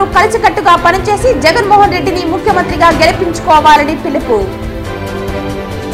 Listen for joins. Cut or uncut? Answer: uncut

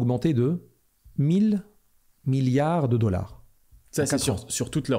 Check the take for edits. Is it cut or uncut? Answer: uncut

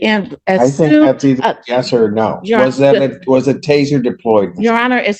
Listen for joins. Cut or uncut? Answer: uncut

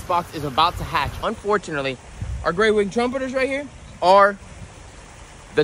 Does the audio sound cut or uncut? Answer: cut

